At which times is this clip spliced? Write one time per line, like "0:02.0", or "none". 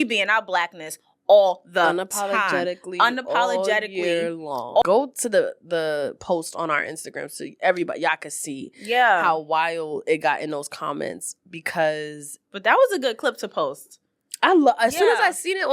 0:04.8